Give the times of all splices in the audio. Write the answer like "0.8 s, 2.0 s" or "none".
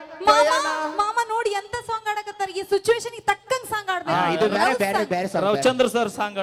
none